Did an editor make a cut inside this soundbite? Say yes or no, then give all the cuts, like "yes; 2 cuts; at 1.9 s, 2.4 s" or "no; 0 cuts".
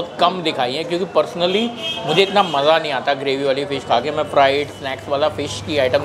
no; 0 cuts